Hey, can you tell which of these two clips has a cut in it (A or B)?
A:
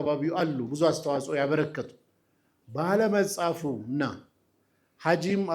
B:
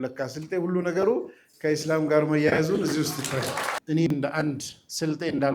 B